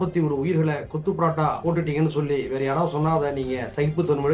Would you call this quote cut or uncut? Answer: cut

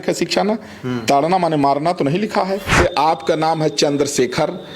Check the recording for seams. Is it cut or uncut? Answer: cut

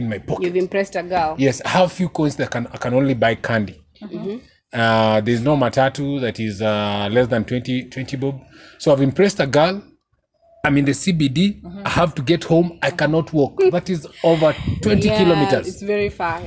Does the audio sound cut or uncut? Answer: uncut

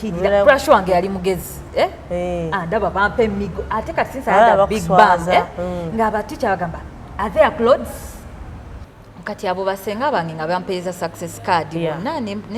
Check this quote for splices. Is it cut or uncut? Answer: cut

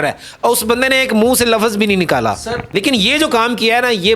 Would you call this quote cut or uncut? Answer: cut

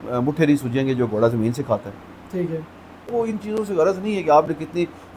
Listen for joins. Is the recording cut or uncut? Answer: cut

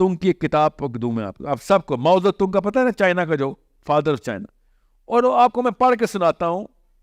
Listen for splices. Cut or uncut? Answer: uncut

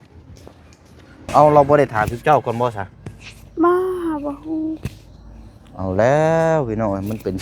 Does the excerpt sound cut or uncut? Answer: cut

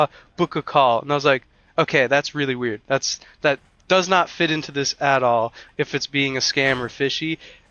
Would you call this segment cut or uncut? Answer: uncut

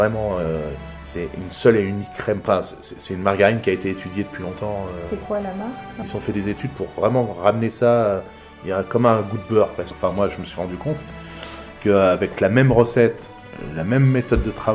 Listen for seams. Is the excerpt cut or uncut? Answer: cut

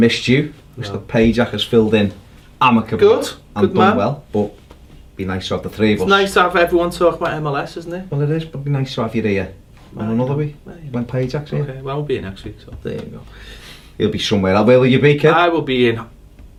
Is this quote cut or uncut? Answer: uncut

